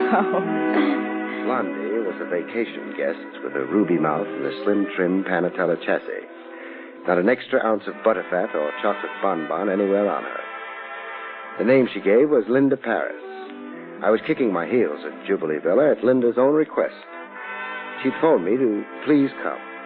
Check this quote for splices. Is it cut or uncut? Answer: uncut